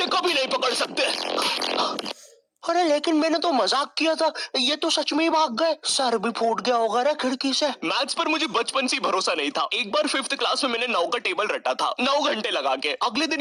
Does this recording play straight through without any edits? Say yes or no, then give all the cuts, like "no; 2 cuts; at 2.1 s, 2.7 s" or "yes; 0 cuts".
yes; 0 cuts